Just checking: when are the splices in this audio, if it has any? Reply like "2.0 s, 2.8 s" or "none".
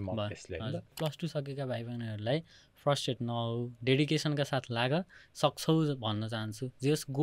1.0 s